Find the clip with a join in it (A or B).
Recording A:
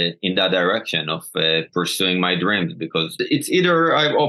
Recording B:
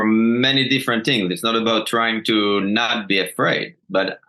A